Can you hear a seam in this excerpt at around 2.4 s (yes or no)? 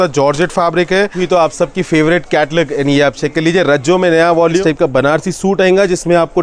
no